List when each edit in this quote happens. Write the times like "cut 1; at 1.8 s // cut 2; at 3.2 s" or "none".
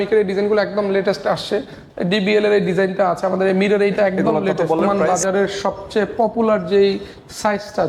cut 1; at 4.8 s